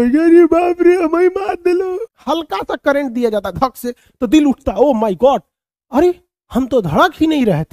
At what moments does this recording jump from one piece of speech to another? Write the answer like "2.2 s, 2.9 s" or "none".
2.1 s